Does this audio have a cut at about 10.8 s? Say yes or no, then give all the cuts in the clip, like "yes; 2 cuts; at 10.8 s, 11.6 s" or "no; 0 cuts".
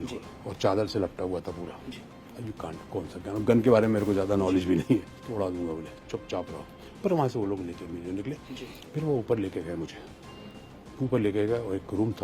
no; 2 cuts; at 5.2 s, 8.5 s